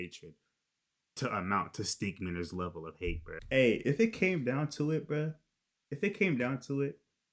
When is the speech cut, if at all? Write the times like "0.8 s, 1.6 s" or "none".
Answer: 3.4 s